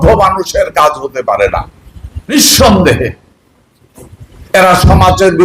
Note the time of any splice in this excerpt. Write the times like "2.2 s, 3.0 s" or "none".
2.3 s